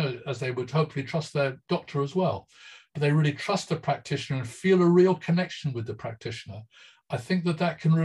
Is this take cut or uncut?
cut